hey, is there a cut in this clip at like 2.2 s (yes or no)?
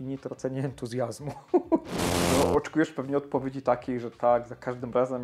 yes